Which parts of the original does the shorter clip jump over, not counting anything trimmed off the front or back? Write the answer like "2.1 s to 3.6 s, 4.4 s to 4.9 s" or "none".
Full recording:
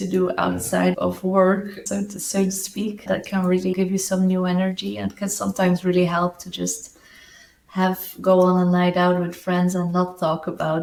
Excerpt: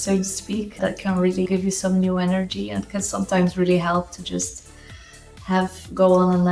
none